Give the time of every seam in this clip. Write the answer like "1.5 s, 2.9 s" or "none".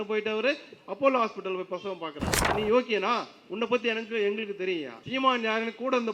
2.5 s, 5.0 s